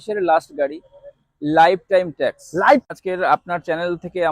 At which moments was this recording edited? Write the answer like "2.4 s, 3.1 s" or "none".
2.8 s